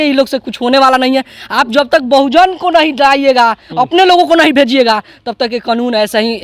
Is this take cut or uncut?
uncut